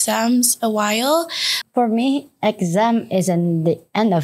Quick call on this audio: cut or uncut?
cut